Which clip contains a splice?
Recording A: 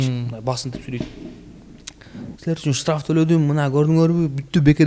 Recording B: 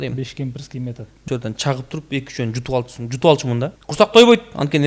B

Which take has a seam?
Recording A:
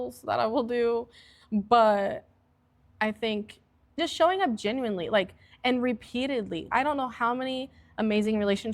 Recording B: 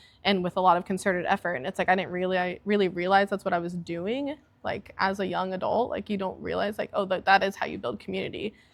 A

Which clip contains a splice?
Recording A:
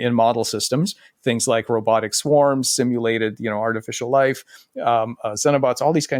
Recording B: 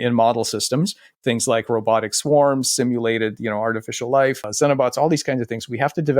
B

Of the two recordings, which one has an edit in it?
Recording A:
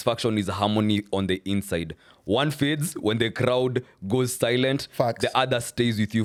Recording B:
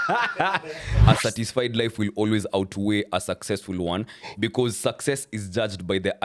B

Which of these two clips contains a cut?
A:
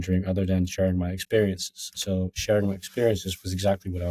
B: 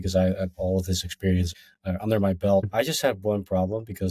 B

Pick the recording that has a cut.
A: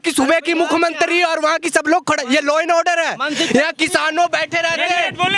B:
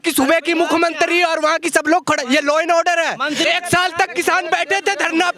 B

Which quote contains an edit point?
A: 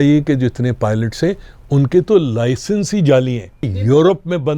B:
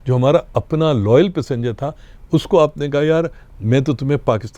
A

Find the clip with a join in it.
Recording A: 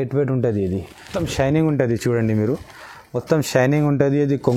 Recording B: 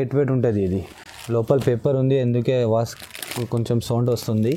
A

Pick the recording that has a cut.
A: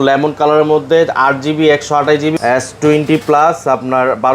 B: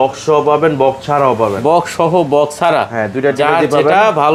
A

